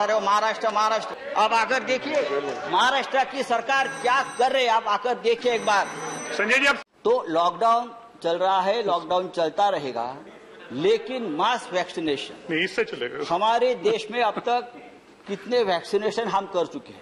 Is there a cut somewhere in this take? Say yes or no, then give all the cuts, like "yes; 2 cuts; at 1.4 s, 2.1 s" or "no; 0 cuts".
no; 0 cuts